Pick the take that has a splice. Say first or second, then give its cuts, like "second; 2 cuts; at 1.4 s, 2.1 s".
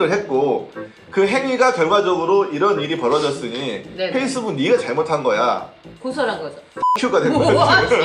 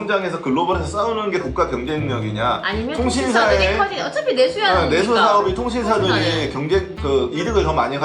first; 1 cut; at 5.8 s